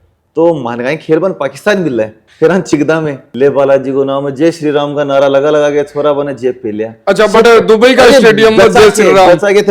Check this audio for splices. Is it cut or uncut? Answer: cut